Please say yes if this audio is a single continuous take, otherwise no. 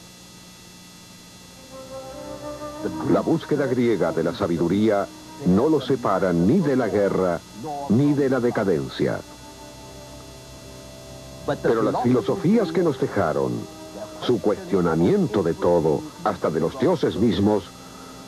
no